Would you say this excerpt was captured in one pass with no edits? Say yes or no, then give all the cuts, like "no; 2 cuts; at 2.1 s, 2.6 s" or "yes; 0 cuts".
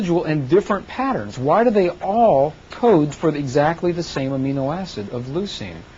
yes; 0 cuts